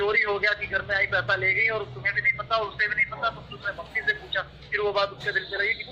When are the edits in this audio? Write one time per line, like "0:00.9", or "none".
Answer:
none